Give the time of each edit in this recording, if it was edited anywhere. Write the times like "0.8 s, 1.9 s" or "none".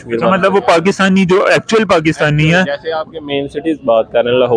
none